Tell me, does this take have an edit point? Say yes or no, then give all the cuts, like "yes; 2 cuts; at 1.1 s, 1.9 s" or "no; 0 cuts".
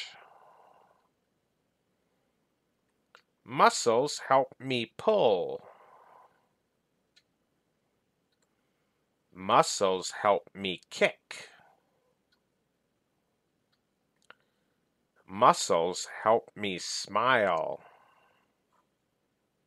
yes; 3 cuts; at 1.6 s, 7.3 s, 13.1 s